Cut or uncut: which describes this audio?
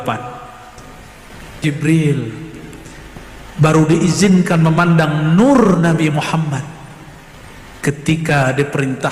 cut